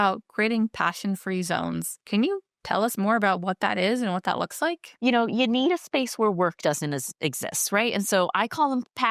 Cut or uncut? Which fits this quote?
cut